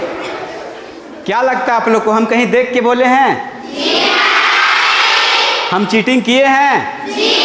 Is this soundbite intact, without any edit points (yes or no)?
no